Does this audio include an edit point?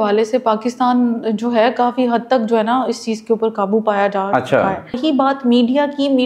yes; 1 cut; at 5.0 s

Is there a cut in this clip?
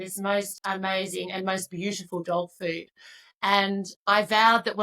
yes; 1 cut; at 3.9 s

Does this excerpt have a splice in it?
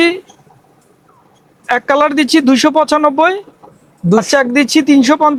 no; 0 cuts

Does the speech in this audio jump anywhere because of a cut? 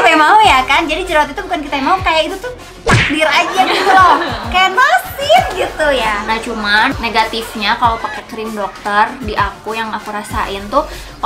yes; 1 cut; at 6.6 s

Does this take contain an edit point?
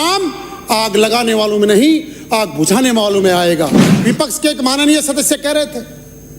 yes; 1 cut; at 3.9 s

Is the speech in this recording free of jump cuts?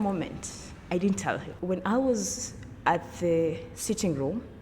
no; 1 cut; at 1.5 s

